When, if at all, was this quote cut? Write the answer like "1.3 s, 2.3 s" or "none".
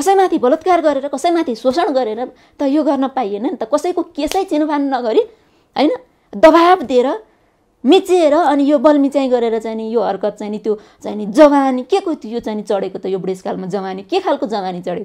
none